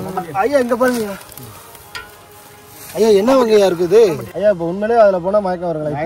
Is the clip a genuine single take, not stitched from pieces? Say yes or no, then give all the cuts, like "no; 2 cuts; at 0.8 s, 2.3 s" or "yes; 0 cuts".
no; 1 cut; at 4.3 s